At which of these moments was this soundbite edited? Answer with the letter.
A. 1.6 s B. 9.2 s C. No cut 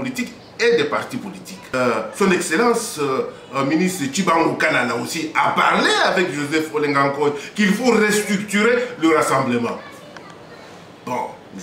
A